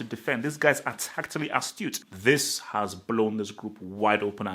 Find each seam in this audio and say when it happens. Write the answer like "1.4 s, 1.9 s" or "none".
2.0 s